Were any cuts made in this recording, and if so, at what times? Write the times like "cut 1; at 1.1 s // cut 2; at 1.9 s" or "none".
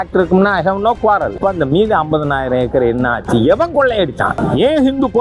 cut 1; at 1.4 s // cut 2; at 4.4 s